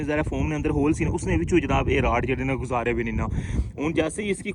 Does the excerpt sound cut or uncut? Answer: uncut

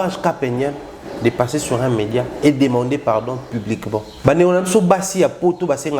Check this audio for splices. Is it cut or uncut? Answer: cut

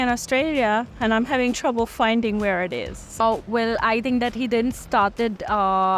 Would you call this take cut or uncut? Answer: cut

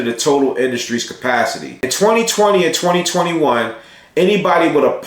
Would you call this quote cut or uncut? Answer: cut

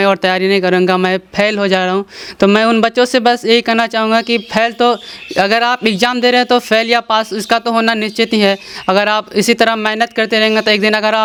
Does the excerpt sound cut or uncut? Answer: uncut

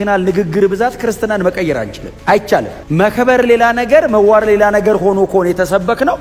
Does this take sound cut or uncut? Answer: uncut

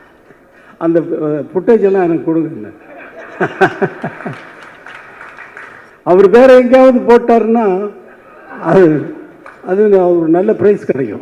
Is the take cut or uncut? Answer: cut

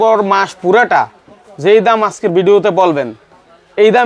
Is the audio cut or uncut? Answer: uncut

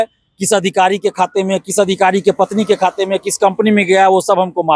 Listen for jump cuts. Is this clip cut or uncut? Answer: uncut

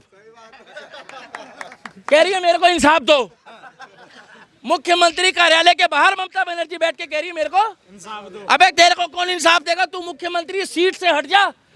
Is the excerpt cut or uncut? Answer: uncut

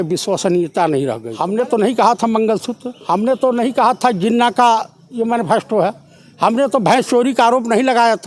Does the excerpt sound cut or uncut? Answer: cut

